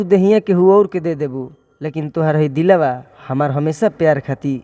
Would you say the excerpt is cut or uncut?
uncut